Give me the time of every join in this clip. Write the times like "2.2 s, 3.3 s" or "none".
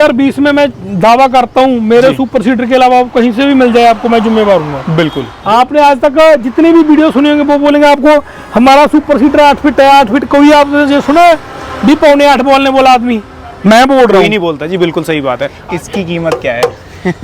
5.3 s, 15.5 s

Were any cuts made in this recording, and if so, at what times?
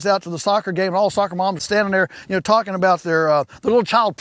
1.6 s

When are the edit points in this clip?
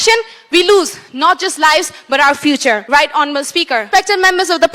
2.8 s, 3.9 s

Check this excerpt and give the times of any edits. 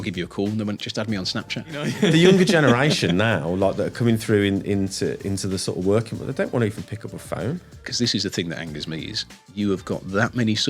2.0 s, 7.8 s

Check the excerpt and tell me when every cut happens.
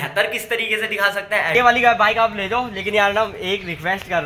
1.5 s

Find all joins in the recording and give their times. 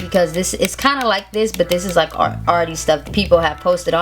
3.0 s

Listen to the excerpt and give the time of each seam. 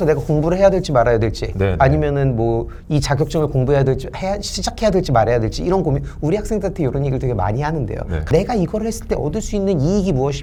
none

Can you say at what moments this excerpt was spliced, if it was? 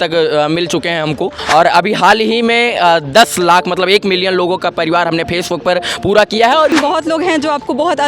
1.4 s, 6.7 s

